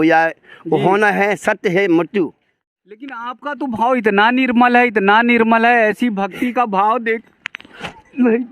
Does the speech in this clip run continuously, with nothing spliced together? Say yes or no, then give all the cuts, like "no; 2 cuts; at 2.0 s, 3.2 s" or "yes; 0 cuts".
no; 1 cut; at 2.8 s